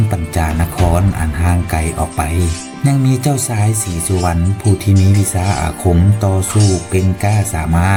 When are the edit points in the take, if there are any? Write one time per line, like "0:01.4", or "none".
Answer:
none